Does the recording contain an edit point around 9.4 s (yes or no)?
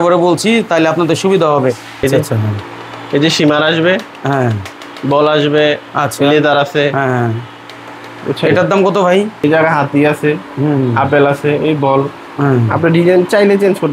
yes